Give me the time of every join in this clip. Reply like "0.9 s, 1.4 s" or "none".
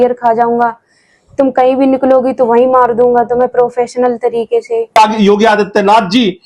5.0 s

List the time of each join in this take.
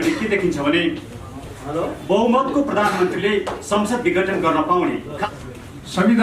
5.3 s

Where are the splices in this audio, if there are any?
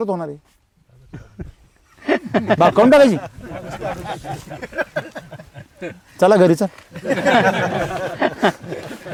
none

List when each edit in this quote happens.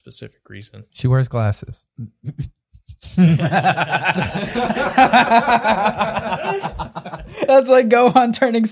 0.9 s, 1.8 s

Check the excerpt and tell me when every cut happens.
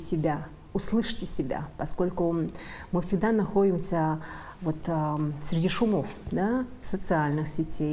none

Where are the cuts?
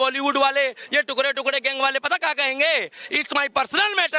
none

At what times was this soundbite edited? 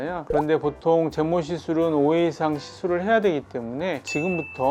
none

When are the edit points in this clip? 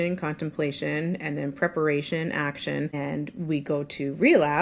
2.9 s

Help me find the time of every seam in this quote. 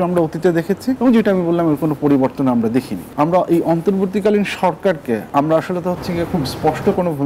1.0 s, 3.0 s, 5.3 s

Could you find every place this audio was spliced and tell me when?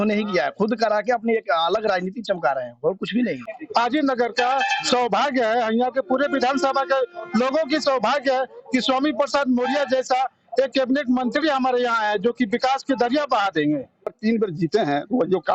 3.5 s, 14.2 s

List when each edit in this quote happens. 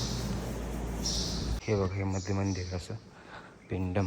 1.6 s

